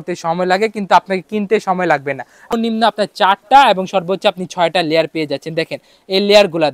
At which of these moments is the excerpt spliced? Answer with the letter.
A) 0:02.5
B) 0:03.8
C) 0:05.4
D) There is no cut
A